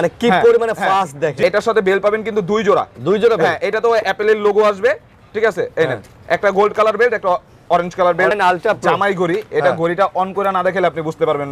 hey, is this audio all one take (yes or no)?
no